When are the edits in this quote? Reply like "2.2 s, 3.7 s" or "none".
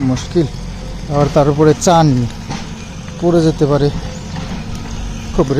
none